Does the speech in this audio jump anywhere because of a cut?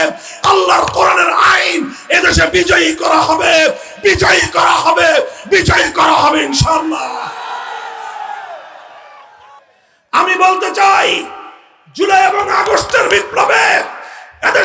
yes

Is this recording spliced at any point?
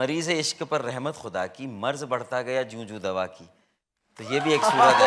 no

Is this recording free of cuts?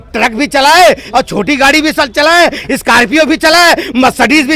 yes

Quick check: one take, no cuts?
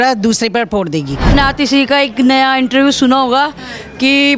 no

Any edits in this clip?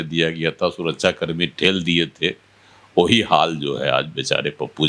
no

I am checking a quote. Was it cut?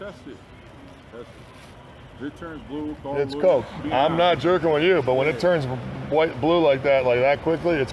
yes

